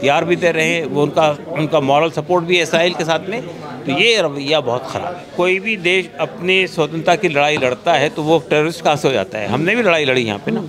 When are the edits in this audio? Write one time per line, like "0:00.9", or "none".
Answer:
0:05.2